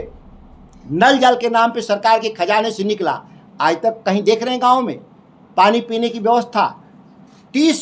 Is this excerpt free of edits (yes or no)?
yes